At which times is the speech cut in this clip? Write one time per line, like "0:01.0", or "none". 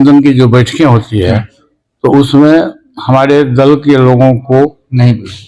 none